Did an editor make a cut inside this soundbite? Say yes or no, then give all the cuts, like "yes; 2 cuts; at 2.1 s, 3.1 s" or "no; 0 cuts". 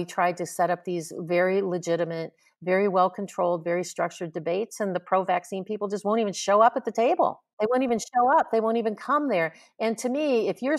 yes; 1 cut; at 7.4 s